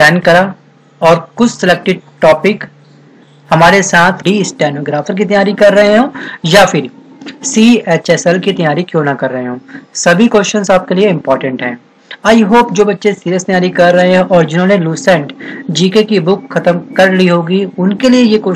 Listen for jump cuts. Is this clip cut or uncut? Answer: uncut